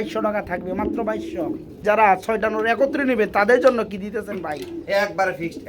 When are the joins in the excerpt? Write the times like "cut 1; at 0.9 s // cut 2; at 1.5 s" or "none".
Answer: cut 1; at 1.8 s

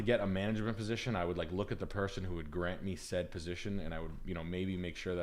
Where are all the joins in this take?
none

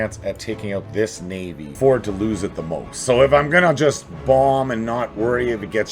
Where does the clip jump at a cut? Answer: cut 1; at 1.7 s

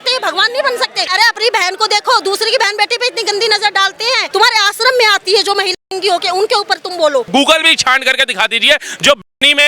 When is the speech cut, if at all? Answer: cut 1; at 1.1 s // cut 2; at 4.3 s // cut 3; at 7.3 s

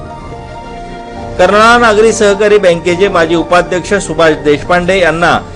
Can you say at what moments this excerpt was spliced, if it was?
cut 1; at 1.0 s

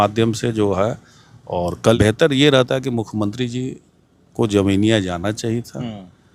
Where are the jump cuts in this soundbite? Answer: cut 1; at 1.9 s

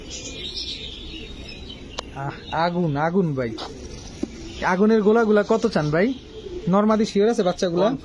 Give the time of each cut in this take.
none

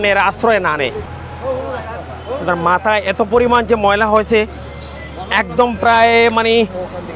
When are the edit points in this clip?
cut 1; at 1.1 s

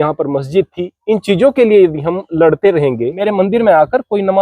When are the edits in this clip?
cut 1; at 3.3 s

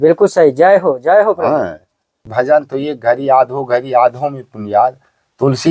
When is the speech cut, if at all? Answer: cut 1; at 2.2 s

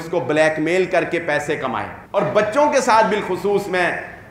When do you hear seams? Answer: cut 1; at 1.9 s

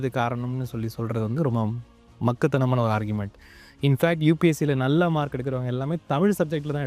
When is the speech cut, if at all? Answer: none

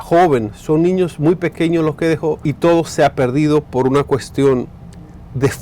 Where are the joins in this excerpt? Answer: cut 1; at 2.5 s

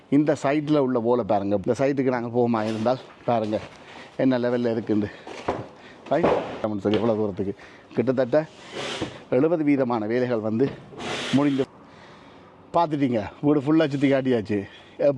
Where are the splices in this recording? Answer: cut 1; at 1.6 s // cut 2; at 6.7 s // cut 3; at 11.7 s

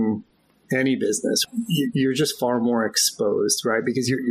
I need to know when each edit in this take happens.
cut 1; at 1.4 s

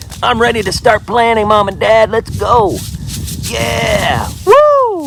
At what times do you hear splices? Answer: none

